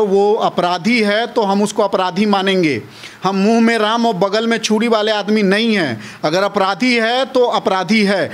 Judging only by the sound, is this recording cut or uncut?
uncut